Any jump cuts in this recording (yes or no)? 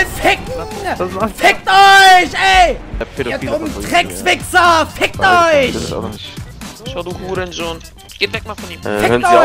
no